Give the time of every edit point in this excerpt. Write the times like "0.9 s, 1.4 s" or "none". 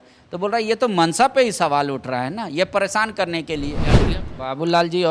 3.9 s